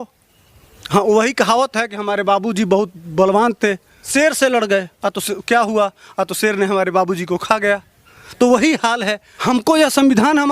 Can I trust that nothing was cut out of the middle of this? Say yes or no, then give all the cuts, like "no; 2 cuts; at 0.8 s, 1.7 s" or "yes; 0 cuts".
no; 2 cuts; at 3.9 s, 9.3 s